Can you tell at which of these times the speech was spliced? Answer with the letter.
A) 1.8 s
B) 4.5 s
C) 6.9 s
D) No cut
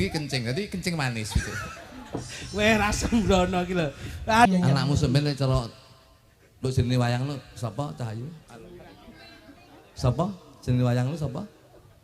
B